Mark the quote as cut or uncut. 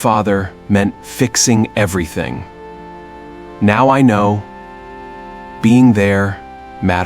uncut